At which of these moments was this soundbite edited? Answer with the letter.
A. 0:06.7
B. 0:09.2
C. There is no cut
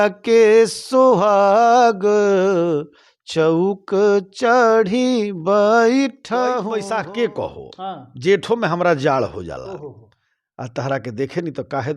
A